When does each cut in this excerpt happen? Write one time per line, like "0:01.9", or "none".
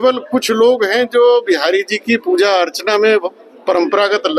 none